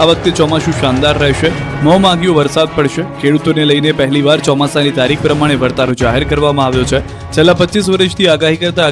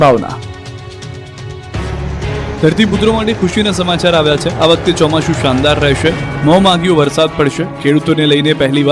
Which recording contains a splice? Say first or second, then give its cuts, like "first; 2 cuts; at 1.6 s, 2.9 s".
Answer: first; 1 cut; at 7.8 s